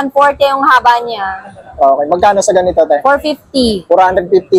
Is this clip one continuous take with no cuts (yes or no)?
yes